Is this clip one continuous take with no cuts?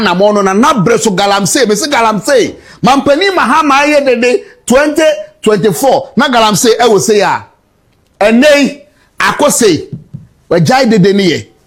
yes; 0 cuts

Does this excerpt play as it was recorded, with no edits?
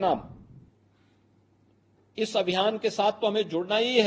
yes; 0 cuts

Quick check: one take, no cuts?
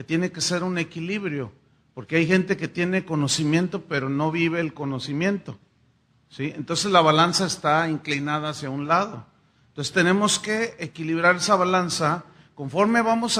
no; 1 cut; at 7.2 s

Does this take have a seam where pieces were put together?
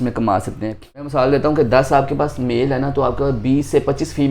yes; 1 cut; at 1.1 s

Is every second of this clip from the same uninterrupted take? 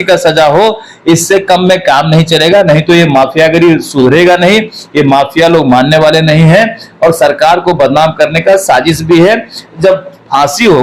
yes; 0 cuts

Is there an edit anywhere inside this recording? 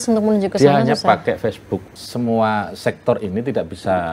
yes; 1 cut; at 1.8 s

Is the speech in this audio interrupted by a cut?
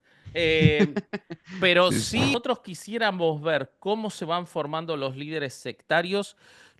yes; 1 cut; at 2.3 s

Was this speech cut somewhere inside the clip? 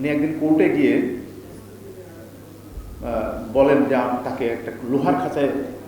no; 0 cuts

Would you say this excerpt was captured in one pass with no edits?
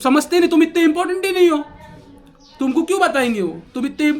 yes; 0 cuts

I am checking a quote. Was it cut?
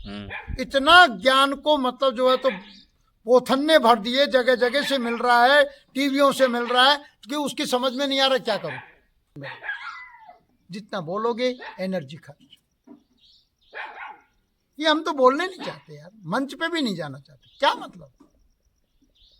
yes; 1 cut; at 9.5 s

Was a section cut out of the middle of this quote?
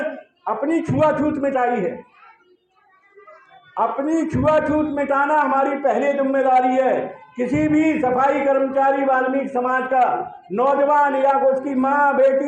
no; 0 cuts

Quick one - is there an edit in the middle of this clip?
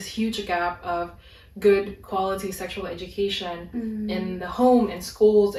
no; 0 cuts

